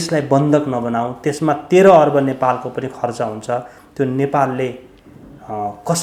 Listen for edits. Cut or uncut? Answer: uncut